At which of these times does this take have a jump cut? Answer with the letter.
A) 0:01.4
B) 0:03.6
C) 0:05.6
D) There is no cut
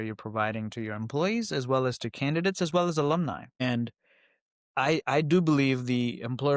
B